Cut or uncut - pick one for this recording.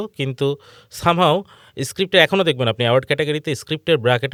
uncut